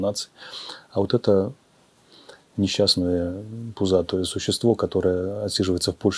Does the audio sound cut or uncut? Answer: uncut